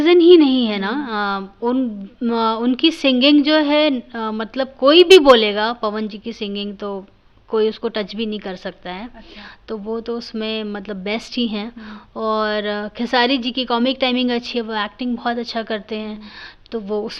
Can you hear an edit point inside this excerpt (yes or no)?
no